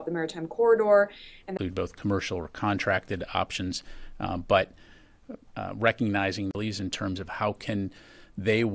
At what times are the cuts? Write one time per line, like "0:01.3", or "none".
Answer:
none